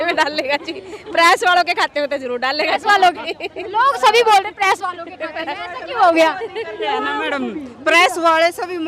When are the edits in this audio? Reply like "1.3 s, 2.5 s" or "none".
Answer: none